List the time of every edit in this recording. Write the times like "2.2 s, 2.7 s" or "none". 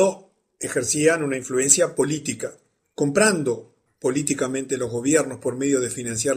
none